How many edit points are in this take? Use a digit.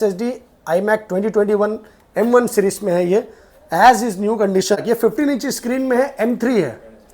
1